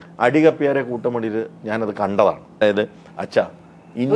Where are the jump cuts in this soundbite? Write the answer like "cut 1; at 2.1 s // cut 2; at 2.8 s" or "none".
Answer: cut 1; at 2.6 s